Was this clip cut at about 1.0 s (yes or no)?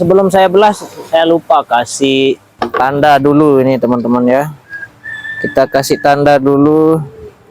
no